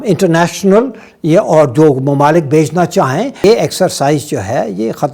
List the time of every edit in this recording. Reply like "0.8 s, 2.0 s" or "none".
3.4 s